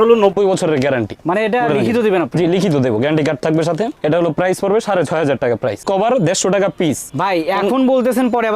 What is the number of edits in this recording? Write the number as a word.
two